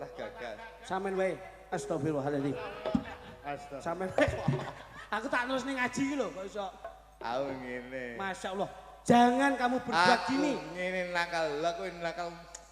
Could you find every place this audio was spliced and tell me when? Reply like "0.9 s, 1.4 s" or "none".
none